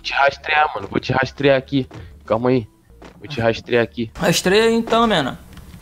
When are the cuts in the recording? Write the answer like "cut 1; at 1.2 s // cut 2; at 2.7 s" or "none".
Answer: cut 1; at 4.1 s